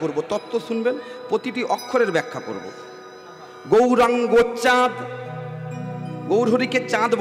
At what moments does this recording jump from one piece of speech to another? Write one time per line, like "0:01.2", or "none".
none